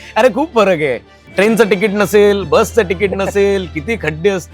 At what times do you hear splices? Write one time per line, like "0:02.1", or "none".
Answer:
0:01.1